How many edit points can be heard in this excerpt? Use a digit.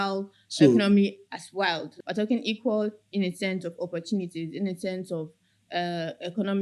1